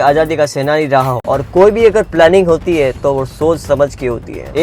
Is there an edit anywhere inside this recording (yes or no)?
yes